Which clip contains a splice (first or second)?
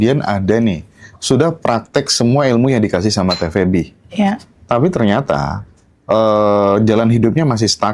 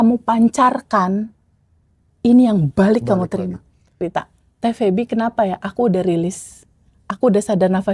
second